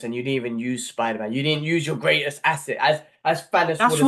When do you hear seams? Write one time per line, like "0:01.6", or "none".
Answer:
none